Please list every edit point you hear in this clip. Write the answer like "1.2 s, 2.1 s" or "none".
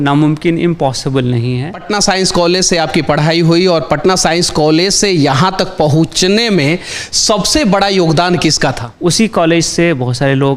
1.8 s, 8.9 s